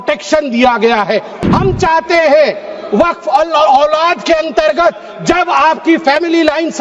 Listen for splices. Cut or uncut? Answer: cut